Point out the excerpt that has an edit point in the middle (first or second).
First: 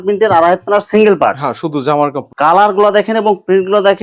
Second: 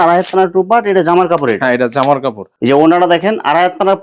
first